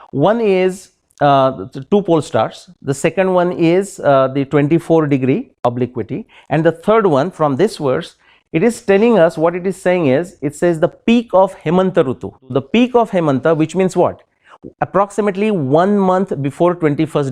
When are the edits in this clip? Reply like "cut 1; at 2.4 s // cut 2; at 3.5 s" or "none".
cut 1; at 12.4 s